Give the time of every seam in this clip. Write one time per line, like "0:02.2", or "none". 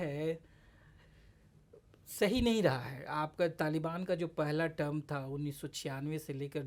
none